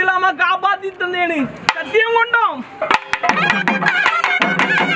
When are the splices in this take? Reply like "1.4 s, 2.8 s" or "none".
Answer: none